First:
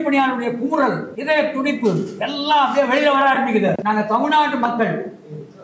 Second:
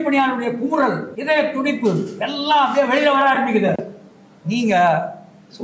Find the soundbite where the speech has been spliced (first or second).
first